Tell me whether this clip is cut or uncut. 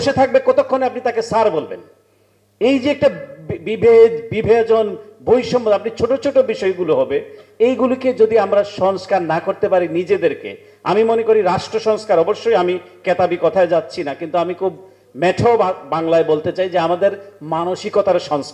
uncut